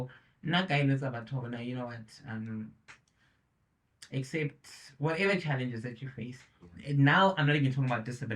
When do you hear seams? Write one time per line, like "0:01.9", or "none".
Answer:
none